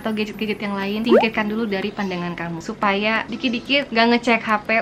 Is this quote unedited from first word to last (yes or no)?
yes